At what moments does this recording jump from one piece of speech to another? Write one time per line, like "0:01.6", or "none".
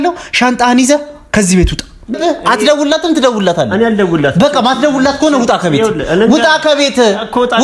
0:02.2